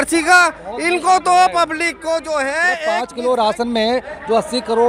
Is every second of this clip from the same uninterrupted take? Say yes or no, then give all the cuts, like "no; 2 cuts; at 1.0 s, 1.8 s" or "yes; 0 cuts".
no; 1 cut; at 3.1 s